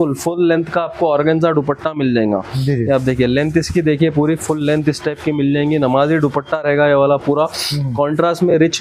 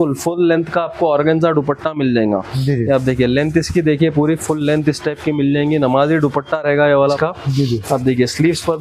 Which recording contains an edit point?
second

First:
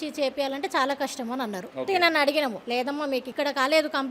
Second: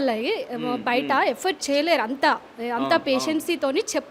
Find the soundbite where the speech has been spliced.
first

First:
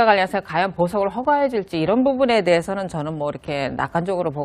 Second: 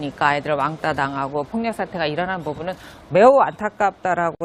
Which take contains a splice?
first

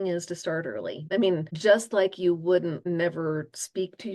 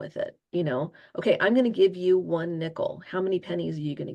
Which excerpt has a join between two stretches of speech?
first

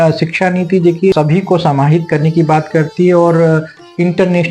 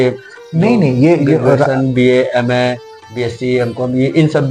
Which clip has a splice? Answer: first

